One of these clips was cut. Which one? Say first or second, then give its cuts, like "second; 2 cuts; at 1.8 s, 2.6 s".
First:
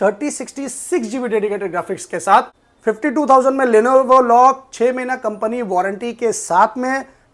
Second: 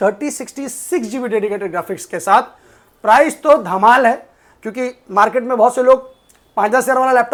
first; 1 cut; at 2.6 s